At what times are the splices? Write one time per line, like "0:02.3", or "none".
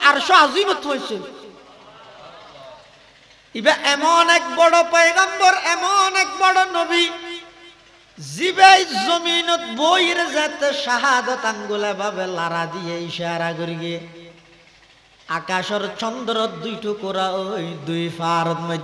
none